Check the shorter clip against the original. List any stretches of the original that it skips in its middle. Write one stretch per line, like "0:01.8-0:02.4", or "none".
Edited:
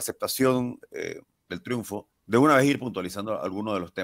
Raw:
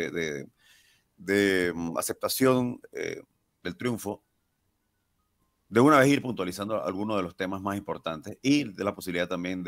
0:03.3-0:03.5
0:04.3-0:05.6